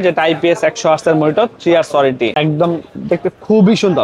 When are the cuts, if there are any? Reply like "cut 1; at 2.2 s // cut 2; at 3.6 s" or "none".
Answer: cut 1; at 2.3 s